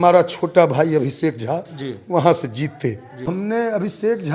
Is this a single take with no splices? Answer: no; 1 cut; at 3.3 s

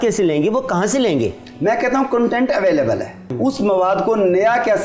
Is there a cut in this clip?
yes; 2 cuts; at 1.5 s, 3.3 s

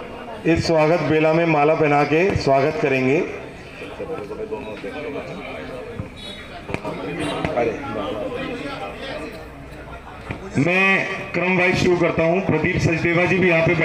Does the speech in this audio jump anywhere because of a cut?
no; 0 cuts

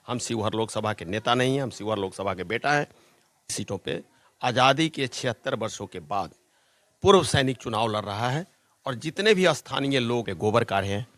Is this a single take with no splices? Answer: no; 2 cuts; at 3.5 s, 10.3 s

